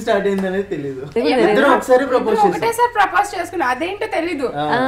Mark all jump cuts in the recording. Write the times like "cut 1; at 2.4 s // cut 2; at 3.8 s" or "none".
cut 1; at 1.1 s